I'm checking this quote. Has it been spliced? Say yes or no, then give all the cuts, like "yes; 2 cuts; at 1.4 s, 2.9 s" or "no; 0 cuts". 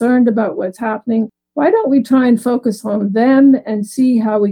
no; 0 cuts